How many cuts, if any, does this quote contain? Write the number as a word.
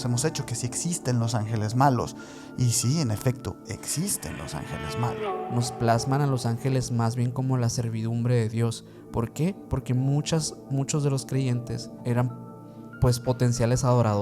two